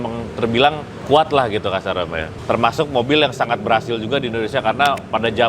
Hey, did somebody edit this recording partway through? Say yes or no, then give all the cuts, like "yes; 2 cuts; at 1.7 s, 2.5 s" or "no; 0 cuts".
yes; 2 cuts; at 0.9 s, 2.2 s